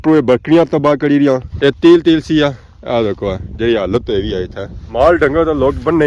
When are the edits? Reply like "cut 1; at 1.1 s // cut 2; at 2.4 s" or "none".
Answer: cut 1; at 1.5 s